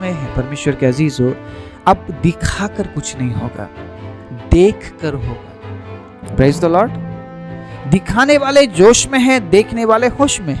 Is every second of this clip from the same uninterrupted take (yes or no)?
yes